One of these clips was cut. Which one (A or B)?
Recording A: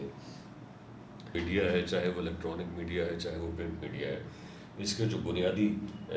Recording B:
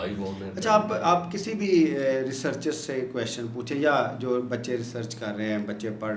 A